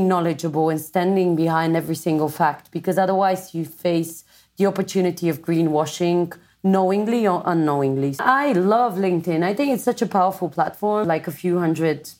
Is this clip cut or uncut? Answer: cut